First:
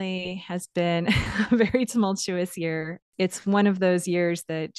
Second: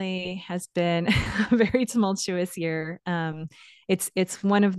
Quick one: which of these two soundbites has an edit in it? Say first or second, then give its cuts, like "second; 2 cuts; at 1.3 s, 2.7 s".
first; 1 cut; at 3.0 s